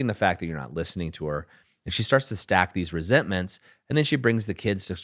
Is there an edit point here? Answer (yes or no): no